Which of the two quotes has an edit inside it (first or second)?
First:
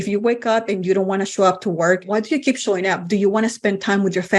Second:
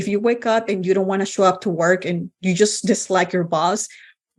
first